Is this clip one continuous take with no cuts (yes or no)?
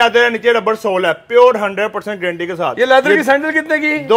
yes